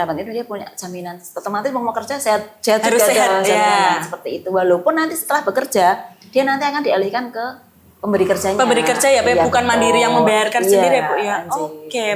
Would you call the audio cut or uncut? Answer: uncut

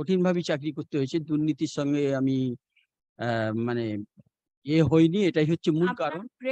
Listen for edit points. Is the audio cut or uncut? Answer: uncut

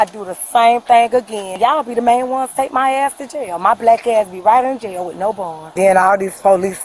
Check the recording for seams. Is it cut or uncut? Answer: cut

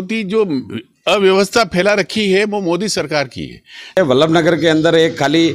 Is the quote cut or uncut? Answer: cut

